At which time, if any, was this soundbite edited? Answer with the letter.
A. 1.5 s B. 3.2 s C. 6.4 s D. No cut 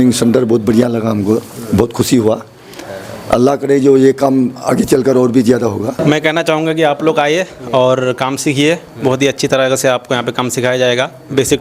D